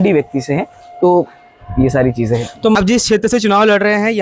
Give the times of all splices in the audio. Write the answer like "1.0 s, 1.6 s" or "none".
2.8 s